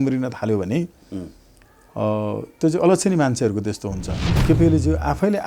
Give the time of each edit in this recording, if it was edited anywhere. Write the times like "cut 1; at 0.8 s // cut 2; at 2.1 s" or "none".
cut 1; at 4.3 s